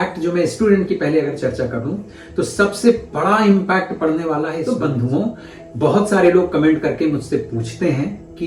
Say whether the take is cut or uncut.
cut